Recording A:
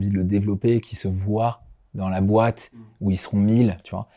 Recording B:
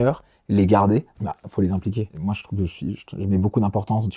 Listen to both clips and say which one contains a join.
B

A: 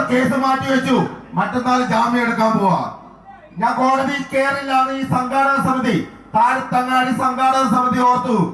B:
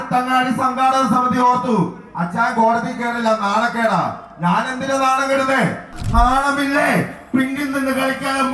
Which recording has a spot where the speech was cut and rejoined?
B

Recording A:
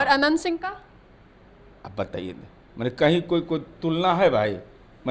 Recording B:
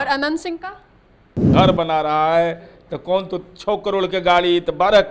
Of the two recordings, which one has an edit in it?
B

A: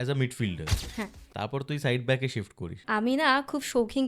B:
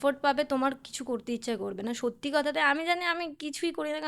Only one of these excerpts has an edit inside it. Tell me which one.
A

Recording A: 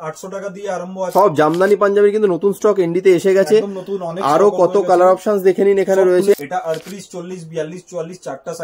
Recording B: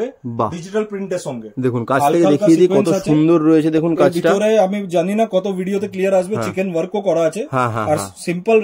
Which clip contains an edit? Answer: A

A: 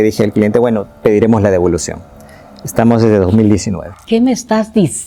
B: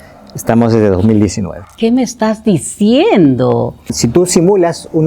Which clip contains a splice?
B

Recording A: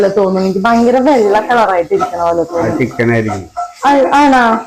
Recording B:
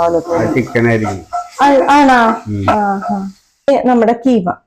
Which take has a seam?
B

